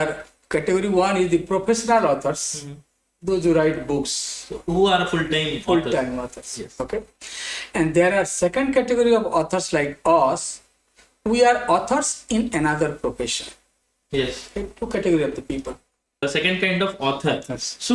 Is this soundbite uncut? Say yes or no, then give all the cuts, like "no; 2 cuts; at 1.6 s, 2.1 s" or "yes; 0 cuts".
no; 1 cut; at 16.2 s